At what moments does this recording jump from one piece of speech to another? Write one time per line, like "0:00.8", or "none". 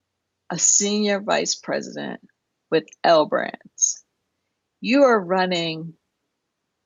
none